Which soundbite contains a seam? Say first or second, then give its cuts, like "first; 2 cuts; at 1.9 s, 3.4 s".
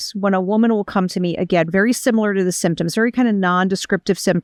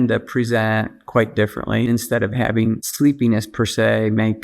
second; 1 cut; at 1.9 s